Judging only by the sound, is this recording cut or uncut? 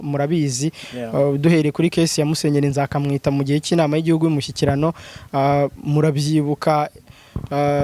uncut